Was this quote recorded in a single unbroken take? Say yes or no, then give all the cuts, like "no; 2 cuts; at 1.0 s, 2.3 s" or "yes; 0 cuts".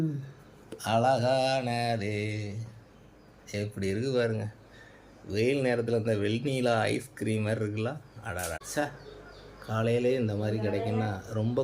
no; 1 cut; at 8.6 s